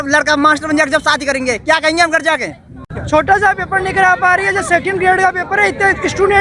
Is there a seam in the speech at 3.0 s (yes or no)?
yes